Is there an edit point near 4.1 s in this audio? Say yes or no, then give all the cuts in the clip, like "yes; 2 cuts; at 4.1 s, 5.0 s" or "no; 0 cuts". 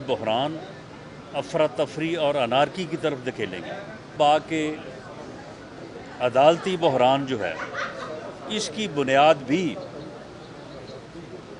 yes; 1 cut; at 4.1 s